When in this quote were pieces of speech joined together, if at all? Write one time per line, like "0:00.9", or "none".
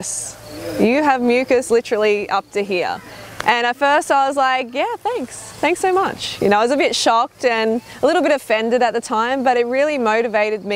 0:06.6

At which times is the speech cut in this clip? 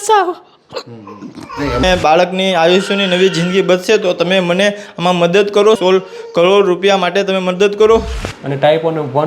0:01.8
0:05.8
0:08.2

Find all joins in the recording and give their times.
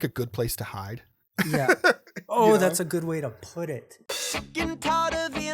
0:03.8

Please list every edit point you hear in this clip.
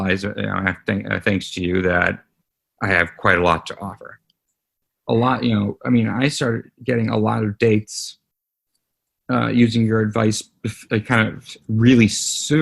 0:04.7

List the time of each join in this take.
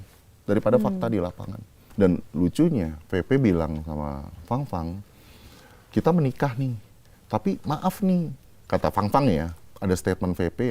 0:01.8

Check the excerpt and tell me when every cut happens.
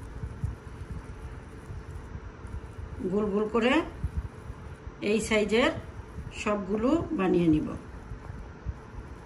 none

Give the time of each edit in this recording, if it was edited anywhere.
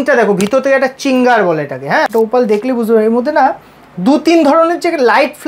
0:02.1

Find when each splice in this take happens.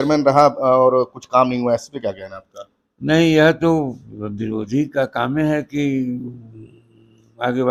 none

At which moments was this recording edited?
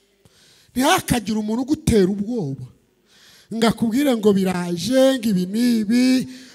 none

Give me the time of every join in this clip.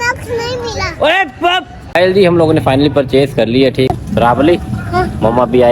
0:01.9
0:03.9

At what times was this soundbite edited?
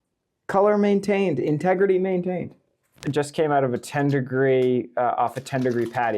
0:03.0

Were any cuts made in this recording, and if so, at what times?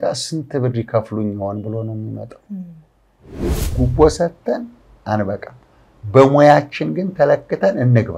0:03.6

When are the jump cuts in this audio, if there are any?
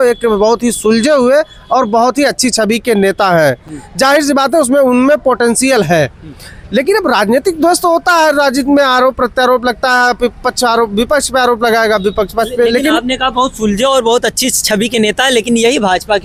none

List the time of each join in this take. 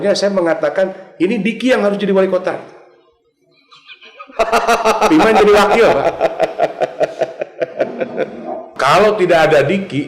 0:08.7

